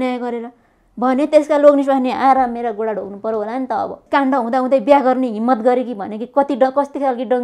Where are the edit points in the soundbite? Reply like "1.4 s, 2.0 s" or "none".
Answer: 4.0 s

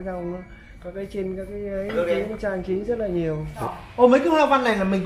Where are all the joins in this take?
3.5 s

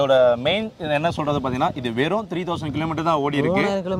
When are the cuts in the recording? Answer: none

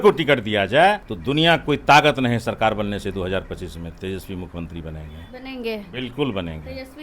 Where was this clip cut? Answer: 1.1 s

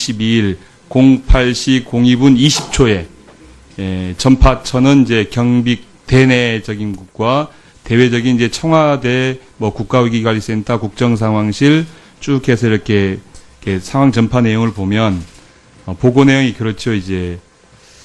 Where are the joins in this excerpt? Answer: 3.7 s

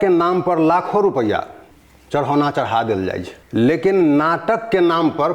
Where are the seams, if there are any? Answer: 1.7 s, 3.3 s

